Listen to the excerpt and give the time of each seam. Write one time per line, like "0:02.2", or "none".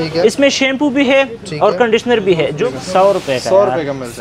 0:02.6